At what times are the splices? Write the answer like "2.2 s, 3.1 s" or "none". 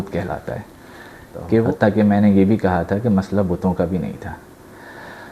1.6 s